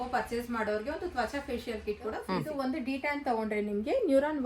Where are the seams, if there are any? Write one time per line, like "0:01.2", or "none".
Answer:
0:02.2

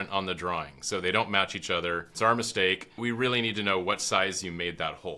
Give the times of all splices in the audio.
0:02.1
0:03.0

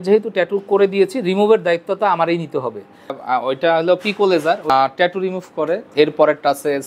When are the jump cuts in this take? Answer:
0:03.1
0:04.7
0:05.9

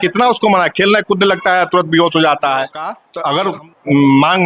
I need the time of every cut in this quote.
0:03.0

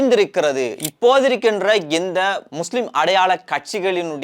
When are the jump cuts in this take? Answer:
0:00.8
0:02.4

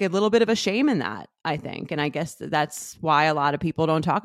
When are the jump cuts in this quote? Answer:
none

